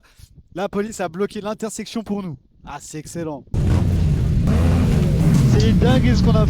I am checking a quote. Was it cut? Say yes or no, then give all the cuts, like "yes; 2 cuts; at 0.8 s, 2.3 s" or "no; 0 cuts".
yes; 2 cuts; at 3.5 s, 4.5 s